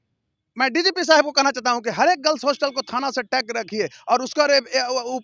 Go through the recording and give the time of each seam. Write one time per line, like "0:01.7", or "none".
none